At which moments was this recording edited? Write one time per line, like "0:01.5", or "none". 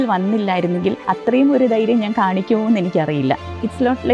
0:01.0

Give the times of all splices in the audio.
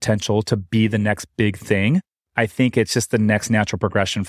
0:02.2

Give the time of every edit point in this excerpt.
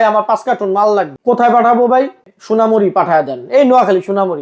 0:01.1
0:02.3

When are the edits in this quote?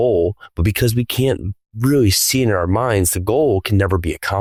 none

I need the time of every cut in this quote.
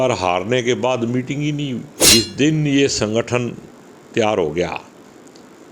0:02.1

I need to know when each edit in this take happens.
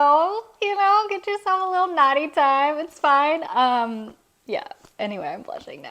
none

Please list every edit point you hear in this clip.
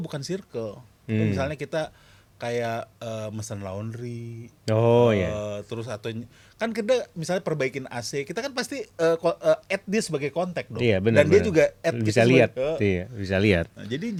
none

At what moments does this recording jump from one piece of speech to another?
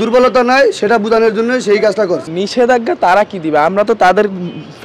0:02.3

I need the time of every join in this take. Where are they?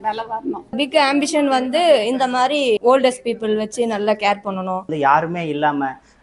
0:00.8
0:02.8
0:04.9

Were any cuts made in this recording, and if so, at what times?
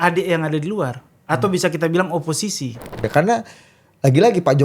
0:03.1

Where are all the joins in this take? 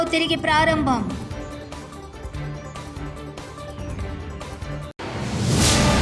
0:04.9

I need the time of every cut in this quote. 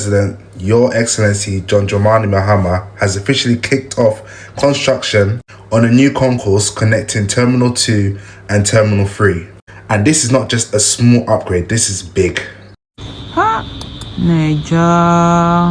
0:12.9

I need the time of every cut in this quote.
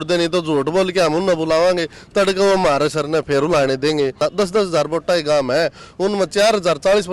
0:04.2

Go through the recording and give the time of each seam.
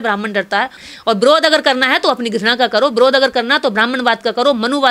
none

